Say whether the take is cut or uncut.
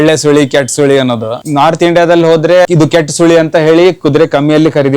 cut